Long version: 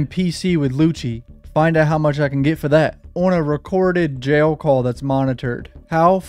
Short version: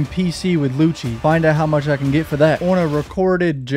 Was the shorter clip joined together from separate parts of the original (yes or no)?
yes